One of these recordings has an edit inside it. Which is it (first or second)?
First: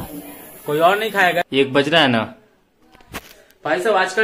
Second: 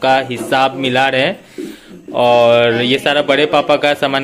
first